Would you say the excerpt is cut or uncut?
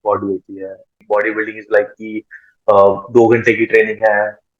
cut